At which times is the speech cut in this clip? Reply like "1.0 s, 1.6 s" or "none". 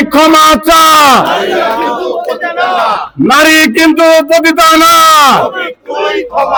none